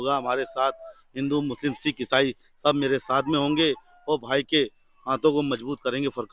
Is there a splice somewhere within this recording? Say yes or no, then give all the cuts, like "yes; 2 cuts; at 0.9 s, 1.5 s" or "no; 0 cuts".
no; 0 cuts